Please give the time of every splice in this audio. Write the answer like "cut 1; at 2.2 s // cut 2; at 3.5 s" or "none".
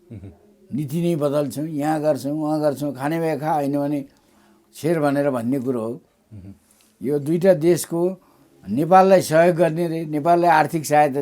none